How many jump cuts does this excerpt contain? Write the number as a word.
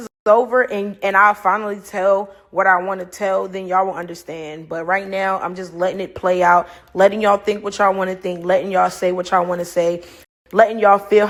zero